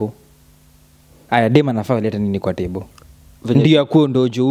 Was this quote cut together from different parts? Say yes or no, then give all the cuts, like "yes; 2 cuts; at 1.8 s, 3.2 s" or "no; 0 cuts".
no; 0 cuts